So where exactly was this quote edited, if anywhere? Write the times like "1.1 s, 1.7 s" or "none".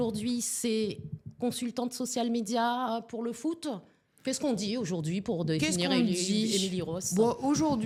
none